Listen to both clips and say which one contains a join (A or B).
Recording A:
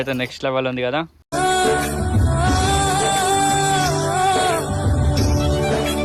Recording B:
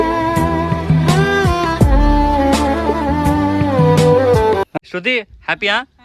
B